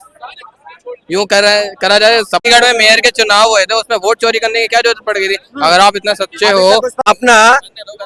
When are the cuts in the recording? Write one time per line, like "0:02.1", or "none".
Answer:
0:02.5
0:07.0